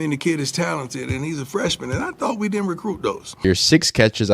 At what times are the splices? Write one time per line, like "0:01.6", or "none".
0:03.4